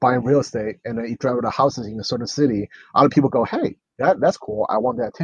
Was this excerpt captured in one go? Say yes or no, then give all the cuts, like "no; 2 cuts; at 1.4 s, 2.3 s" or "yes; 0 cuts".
yes; 0 cuts